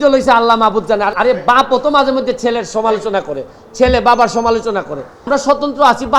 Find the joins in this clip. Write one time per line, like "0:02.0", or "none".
0:01.1
0:05.3